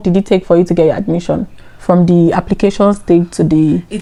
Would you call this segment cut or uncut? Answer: uncut